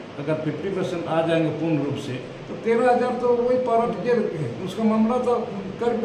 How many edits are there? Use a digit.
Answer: 0